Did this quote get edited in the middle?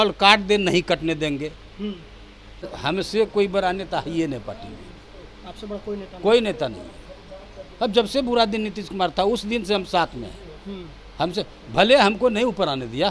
yes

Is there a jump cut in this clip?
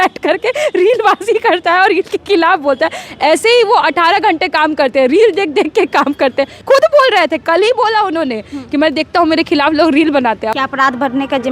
yes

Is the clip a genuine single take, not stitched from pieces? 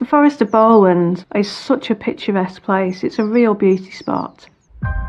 no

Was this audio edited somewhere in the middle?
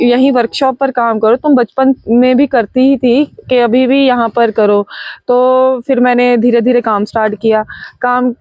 no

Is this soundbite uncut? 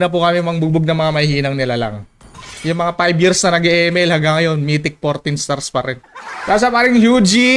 yes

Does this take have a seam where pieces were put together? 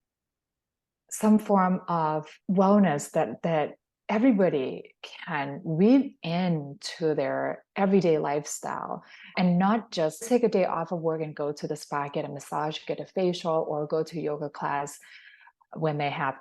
yes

